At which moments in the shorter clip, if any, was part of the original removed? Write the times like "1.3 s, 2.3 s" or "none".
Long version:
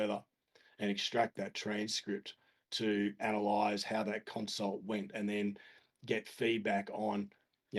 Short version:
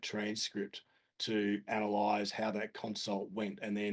none